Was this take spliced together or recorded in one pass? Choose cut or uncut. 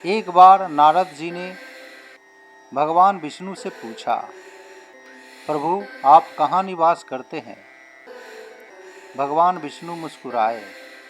cut